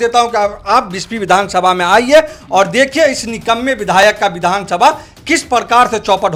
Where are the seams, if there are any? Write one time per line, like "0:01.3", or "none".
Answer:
none